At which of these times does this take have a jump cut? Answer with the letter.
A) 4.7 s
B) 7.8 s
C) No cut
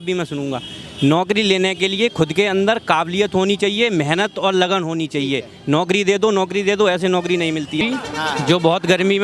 B